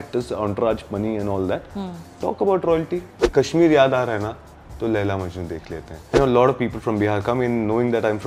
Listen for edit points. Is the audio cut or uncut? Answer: cut